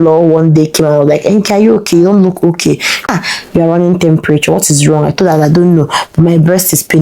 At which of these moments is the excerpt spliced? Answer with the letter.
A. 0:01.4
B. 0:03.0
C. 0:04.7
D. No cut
B